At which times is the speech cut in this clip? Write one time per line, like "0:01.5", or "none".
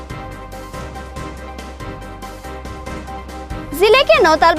0:01.1